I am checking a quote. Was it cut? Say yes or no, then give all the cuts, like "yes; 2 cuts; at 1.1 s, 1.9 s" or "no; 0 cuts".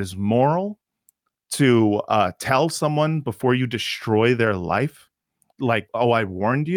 yes; 1 cut; at 5.6 s